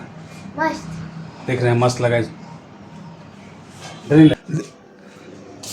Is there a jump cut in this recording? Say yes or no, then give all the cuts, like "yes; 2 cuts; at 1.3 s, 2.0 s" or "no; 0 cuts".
yes; 1 cut; at 4.4 s